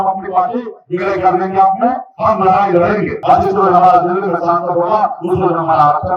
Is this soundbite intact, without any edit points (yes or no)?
no